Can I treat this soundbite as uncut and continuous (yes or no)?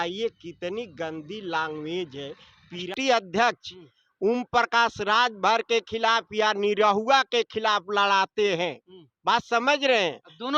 no